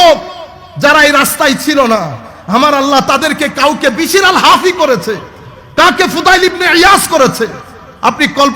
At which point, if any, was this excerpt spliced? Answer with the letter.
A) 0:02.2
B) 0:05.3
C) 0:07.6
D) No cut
D